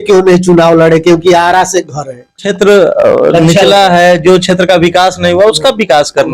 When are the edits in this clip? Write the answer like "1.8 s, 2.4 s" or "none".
2.4 s